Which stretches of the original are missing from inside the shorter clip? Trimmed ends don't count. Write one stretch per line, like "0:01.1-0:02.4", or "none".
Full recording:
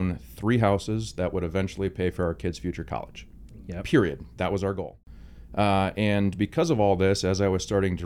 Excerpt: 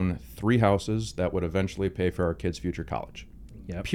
none

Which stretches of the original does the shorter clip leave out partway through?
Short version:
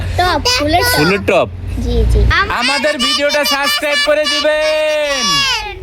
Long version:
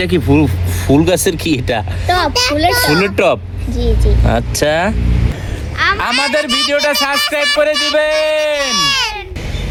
0:04.2-0:05.8

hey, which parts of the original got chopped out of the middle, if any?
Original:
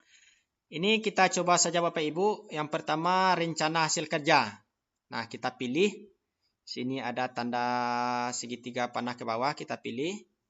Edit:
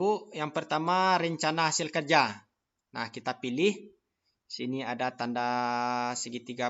none

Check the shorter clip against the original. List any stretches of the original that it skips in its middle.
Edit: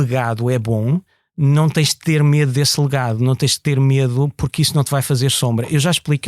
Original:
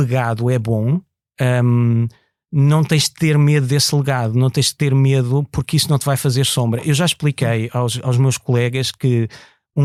0:01.2-0:02.3

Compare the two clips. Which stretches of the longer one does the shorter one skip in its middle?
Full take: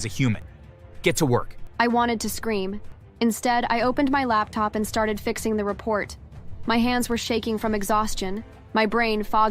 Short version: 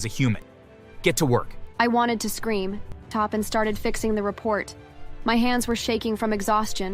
0:03.1-0:04.5

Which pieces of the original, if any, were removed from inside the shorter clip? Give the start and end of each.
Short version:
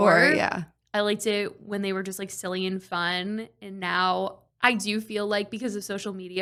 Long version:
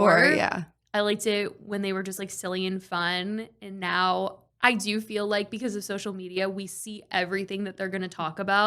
none

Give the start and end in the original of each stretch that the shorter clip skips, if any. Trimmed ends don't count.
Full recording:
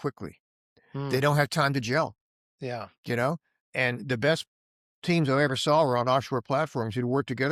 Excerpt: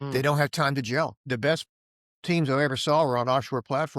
0:02.2-0:04.0

